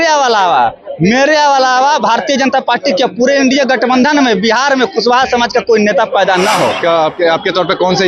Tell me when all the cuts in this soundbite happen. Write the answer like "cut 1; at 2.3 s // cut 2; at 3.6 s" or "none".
cut 1; at 6.8 s